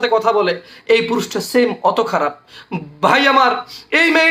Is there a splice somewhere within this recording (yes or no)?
no